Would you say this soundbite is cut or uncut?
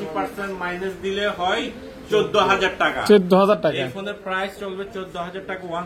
uncut